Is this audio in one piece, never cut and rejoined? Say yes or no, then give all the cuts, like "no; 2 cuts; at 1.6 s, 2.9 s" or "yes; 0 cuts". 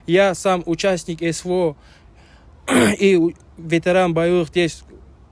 yes; 0 cuts